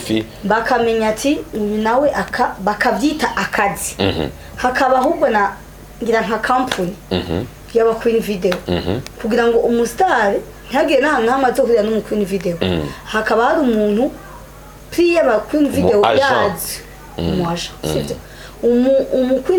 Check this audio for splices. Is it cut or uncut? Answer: uncut